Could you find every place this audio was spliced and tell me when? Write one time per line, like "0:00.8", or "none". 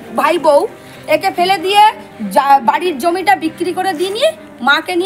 none